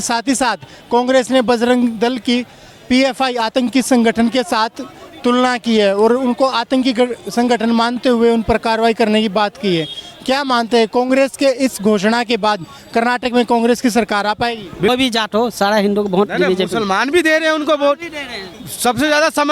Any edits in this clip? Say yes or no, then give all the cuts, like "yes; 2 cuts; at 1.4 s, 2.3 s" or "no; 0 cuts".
yes; 1 cut; at 14.9 s